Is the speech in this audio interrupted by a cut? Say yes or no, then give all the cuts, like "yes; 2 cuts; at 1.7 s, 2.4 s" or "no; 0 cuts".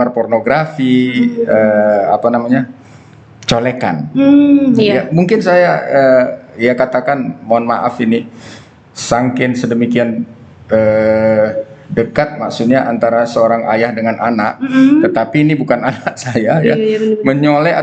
no; 0 cuts